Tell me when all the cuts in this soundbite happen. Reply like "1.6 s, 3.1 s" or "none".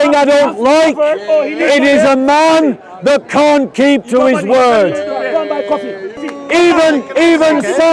6.3 s